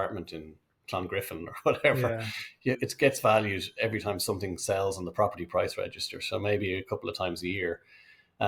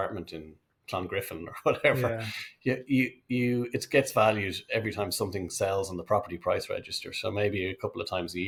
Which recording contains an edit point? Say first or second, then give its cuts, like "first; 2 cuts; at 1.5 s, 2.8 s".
first; 1 cut; at 2.8 s